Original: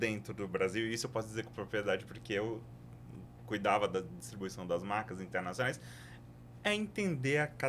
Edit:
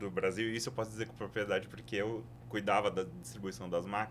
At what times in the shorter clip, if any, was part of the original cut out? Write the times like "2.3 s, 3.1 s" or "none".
2.3 s